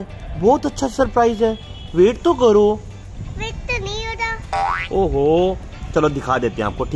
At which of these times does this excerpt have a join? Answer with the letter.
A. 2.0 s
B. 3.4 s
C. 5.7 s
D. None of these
C